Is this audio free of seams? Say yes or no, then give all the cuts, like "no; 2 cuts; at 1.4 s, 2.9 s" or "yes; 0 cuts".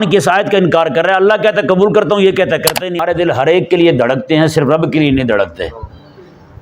no; 1 cut; at 3.0 s